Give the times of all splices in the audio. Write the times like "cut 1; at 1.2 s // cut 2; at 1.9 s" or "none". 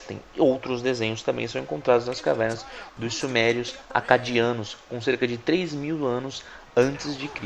cut 1; at 2.9 s